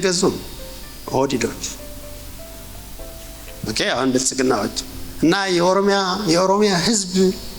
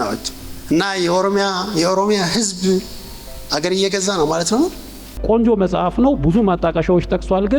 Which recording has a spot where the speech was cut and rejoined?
second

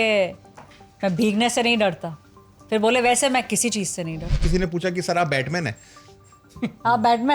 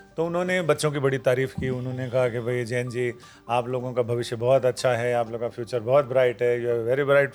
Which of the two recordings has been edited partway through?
first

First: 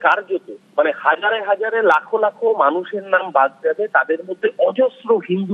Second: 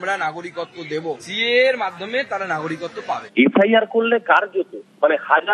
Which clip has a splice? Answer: second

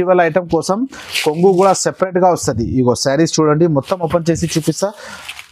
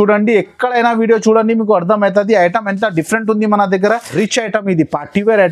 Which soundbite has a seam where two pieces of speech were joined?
second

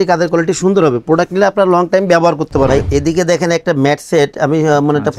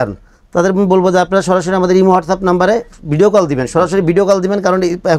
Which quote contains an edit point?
first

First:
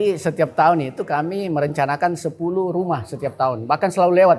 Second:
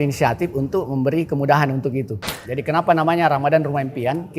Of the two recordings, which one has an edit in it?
second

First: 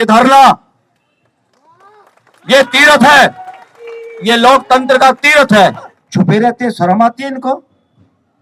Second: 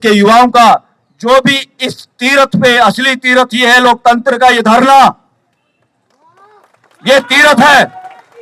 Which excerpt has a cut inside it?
first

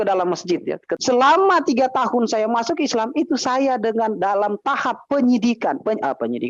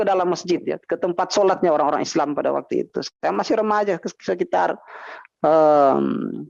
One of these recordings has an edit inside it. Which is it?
first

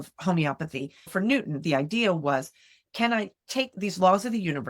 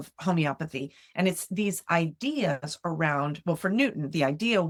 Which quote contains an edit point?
first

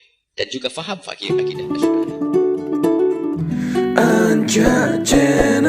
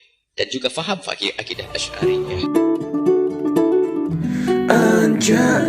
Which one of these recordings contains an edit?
first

